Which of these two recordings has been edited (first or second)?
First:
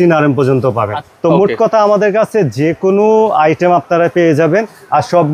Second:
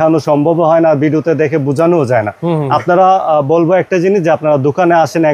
first